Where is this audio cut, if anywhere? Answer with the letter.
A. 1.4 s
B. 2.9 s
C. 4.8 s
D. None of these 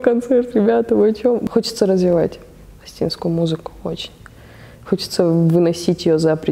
A